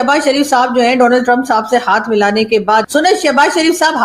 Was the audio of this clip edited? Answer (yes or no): yes